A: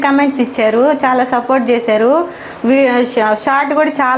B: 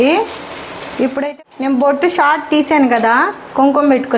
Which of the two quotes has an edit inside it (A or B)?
B